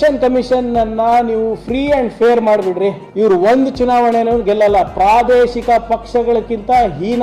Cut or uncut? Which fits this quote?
cut